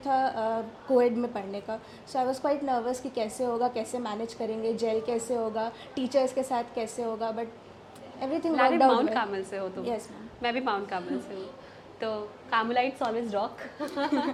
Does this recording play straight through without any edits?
yes; 0 cuts

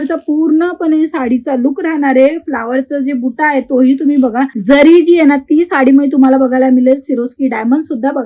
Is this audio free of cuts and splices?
yes; 0 cuts

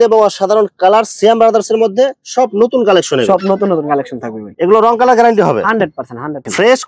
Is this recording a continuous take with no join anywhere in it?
yes; 0 cuts

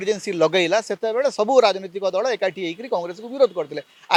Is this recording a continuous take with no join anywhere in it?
yes; 0 cuts

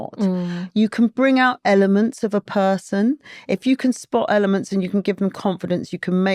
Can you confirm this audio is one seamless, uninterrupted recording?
yes; 0 cuts

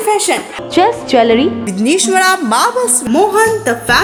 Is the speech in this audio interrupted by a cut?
no; 0 cuts

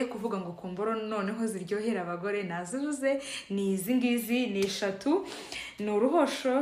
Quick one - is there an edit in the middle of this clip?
no; 0 cuts

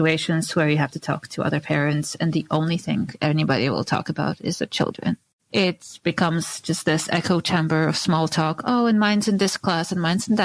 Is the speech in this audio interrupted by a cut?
no; 0 cuts

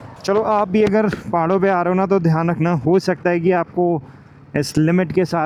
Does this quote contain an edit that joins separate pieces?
no; 0 cuts

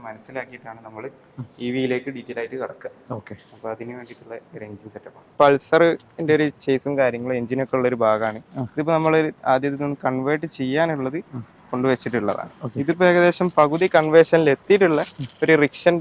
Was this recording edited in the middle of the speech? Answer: no; 0 cuts

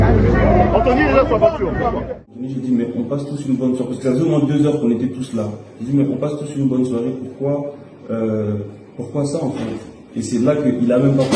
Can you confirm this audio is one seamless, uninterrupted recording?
no; 1 cut; at 2.3 s

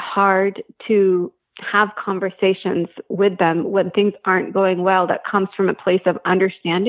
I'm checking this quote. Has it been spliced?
no; 0 cuts

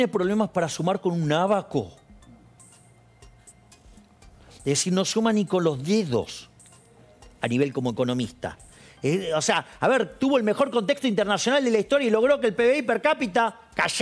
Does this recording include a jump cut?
no; 0 cuts

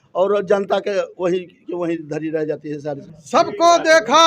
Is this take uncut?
no; 1 cut; at 3.0 s

